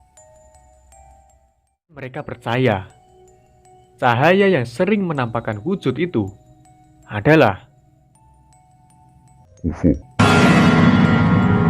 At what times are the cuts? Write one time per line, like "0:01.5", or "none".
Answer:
0:02.1
0:09.9